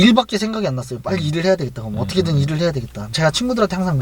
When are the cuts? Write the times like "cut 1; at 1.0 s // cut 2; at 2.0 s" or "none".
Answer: cut 1; at 3.1 s